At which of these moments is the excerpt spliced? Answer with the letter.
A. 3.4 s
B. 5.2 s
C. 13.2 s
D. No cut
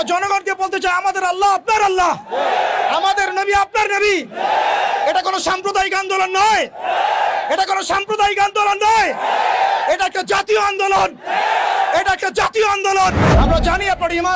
C